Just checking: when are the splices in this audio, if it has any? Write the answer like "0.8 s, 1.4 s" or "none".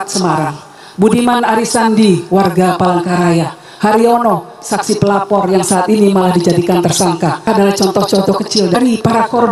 7.4 s, 8.7 s